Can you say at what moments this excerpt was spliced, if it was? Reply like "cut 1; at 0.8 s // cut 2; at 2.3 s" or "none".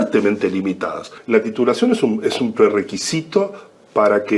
cut 1; at 1.1 s